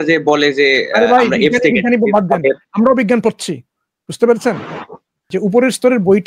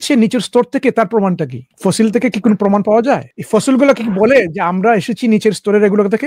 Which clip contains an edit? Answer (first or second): first